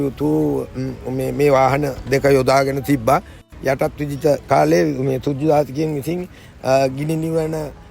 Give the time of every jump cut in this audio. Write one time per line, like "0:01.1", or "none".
0:03.5